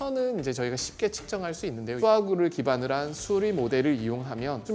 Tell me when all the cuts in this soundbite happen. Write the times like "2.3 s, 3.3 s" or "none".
2.0 s